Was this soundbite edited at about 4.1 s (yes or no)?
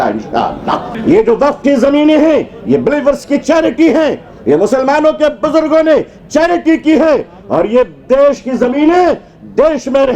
no